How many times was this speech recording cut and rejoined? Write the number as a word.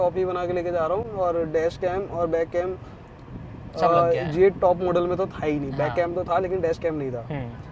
zero